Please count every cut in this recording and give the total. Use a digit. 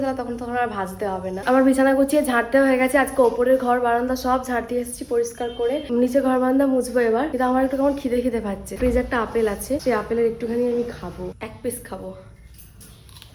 0